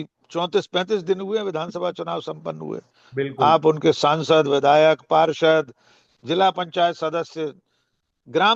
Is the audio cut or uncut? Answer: uncut